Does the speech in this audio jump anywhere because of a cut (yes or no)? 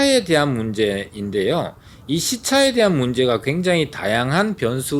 no